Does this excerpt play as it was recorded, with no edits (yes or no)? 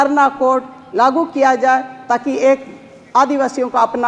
yes